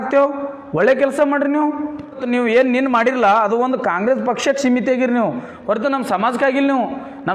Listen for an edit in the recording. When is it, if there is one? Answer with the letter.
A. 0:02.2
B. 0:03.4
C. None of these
A